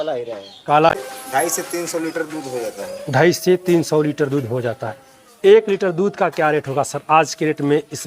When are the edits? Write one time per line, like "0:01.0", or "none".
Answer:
0:00.9